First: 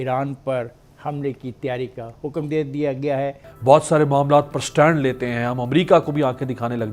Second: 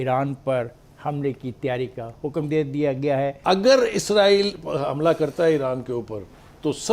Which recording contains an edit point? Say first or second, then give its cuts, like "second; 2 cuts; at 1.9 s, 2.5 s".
second; 1 cut; at 3.4 s